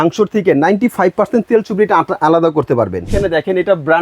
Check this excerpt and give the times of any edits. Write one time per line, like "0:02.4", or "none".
0:03.1

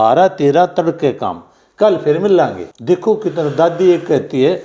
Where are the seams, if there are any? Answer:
0:02.7

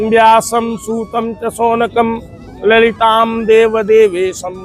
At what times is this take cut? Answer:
none

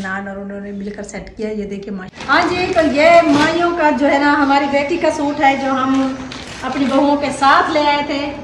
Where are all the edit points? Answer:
0:02.1

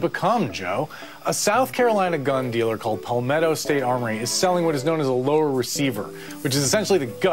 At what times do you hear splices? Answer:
0:01.1

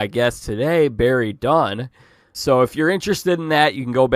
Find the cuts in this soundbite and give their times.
0:02.3

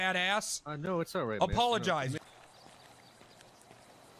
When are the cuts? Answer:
0:02.1

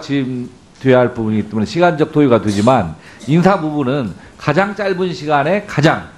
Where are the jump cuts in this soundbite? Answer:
0:04.1

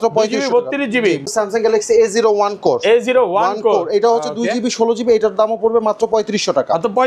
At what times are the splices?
0:01.3

